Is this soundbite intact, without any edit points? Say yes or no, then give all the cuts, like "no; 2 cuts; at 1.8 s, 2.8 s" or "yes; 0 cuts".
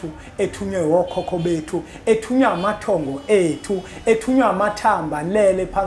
yes; 0 cuts